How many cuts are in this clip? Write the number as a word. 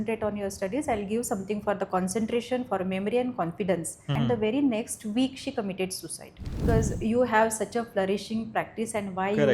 two